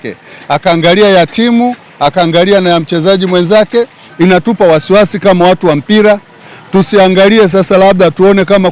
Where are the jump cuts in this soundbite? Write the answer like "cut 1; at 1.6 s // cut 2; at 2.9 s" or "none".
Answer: cut 1; at 4.0 s

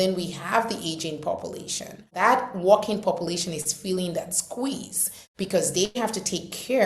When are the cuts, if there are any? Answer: cut 1; at 2.1 s

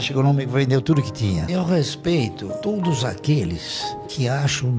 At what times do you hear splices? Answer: cut 1; at 1.4 s

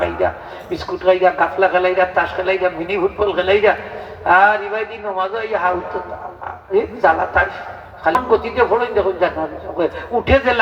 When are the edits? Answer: cut 1; at 8.2 s

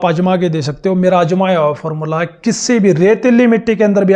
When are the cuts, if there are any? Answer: none

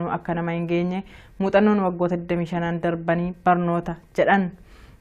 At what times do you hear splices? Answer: cut 1; at 1.1 s

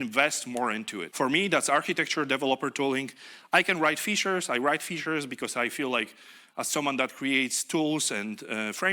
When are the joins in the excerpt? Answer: cut 1; at 1.0 s

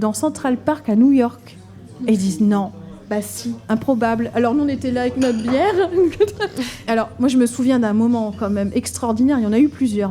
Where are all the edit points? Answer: cut 1; at 3.6 s // cut 2; at 6.8 s

